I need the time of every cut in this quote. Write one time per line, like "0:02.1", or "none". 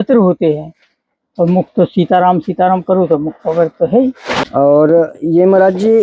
0:04.4